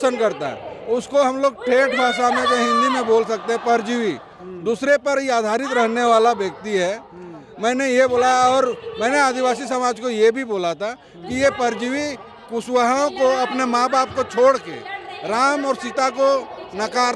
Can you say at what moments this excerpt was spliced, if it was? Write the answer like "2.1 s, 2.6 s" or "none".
none